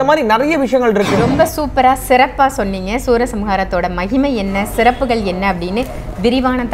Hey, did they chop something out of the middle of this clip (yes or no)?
yes